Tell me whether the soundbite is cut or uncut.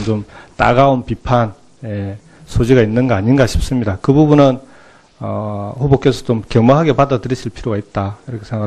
uncut